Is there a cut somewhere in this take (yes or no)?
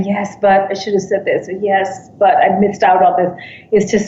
no